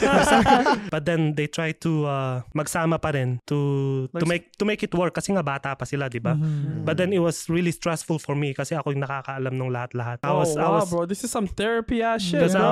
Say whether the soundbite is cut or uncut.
cut